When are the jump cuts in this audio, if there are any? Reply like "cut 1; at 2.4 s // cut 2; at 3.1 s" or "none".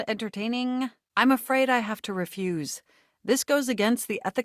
none

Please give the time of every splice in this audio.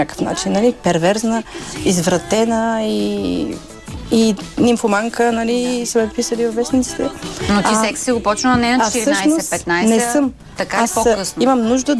none

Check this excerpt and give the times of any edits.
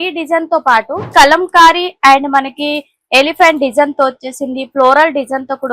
cut 1; at 1.0 s

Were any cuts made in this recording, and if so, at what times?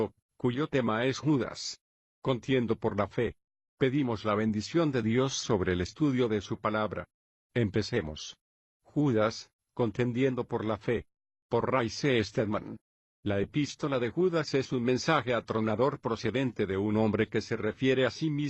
cut 1; at 16.4 s

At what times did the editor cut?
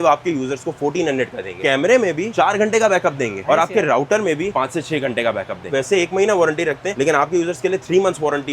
cut 1; at 1.6 s // cut 2; at 5.7 s

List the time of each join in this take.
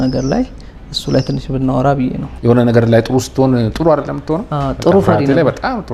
cut 1; at 2.3 s

